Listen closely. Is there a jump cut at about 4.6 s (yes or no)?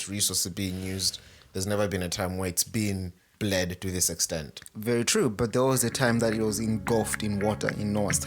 no